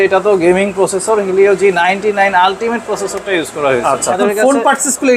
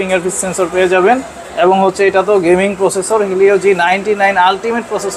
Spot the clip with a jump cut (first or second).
first